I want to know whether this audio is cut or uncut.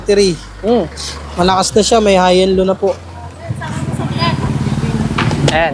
uncut